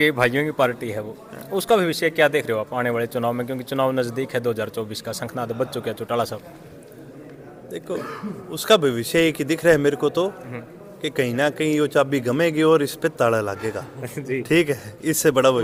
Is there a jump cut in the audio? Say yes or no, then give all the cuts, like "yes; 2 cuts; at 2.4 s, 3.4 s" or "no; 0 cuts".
no; 0 cuts